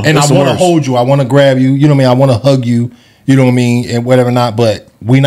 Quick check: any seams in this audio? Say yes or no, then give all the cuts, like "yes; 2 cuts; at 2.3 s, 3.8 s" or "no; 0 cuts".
no; 0 cuts